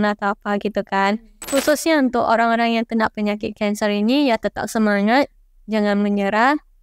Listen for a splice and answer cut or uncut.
cut